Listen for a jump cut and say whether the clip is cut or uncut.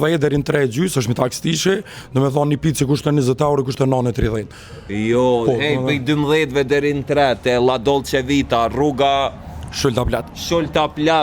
uncut